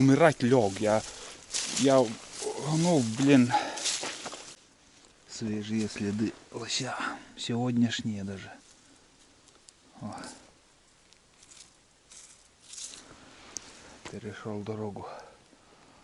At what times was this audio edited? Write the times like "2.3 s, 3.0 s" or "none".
4.6 s